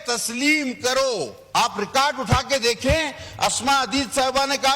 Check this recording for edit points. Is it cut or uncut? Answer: cut